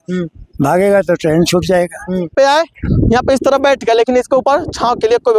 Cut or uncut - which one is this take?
cut